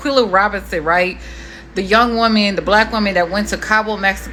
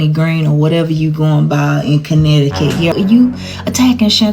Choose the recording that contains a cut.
second; 1 cut; at 2.9 s

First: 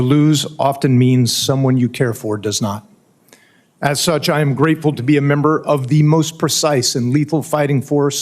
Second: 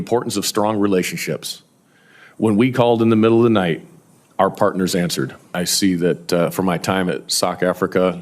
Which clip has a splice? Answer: second; 1 cut; at 5.4 s

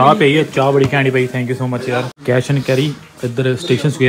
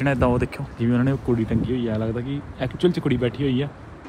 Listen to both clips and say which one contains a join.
first; 1 cut; at 2.1 s

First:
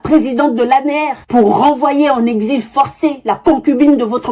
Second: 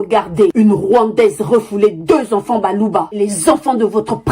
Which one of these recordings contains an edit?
second; 1 cut; at 3.1 s

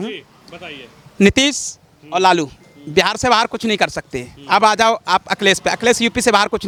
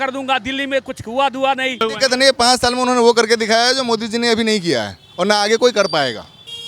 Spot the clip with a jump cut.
second; 1 cut; at 1.8 s

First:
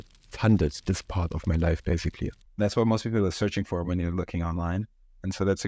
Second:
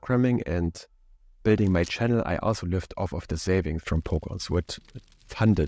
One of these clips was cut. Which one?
first; 1 cut; at 2.4 s

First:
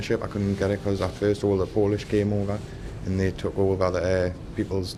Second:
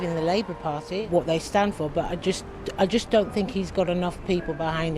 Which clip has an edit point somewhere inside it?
second; 1 cut; at 1.0 s

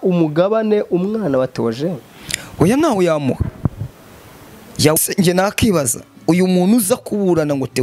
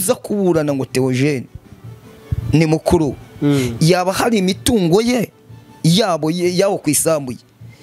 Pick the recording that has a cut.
first; 1 cut; at 5.0 s

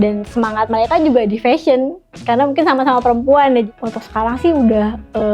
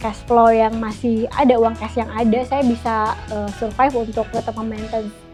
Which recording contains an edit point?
first; 1 cut; at 3.7 s

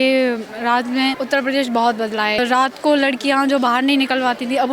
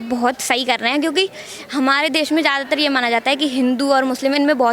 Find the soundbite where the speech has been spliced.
first; 2 cuts; at 1.2 s, 2.4 s

